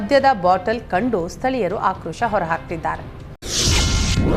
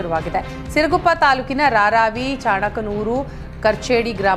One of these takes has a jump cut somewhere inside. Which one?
first; 1 cut; at 3.4 s

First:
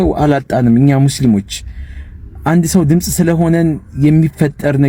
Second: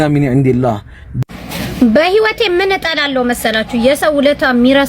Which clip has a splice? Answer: second; 1 cut; at 1.2 s

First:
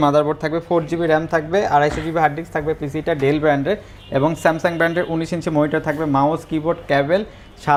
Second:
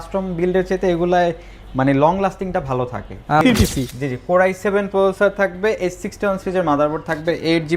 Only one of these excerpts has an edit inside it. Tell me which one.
second; 1 cut; at 3.4 s

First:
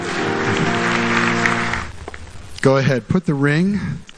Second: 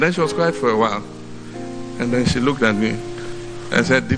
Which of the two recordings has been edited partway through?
first; 1 cut; at 1.7 s

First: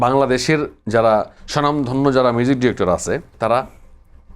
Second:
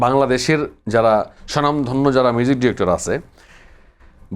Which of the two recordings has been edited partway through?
first; 1 cut; at 3.3 s

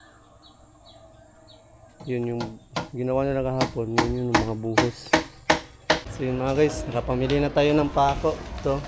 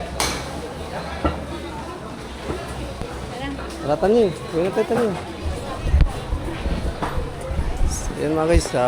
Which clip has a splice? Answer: first; 1 cut; at 6.1 s

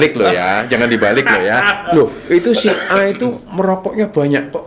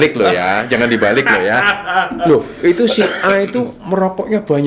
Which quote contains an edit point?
first; 1 cut; at 1.8 s

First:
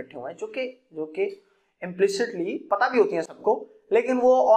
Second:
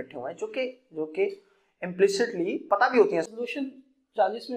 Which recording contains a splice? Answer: second; 1 cut; at 3.3 s

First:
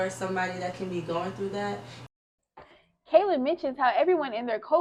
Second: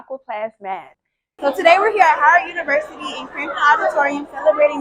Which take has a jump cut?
second; 1 cut; at 1.2 s

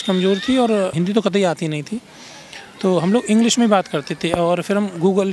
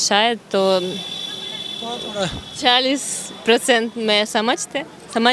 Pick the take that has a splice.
first; 1 cut; at 0.9 s

